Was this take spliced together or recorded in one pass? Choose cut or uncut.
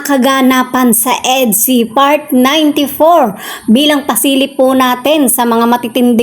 uncut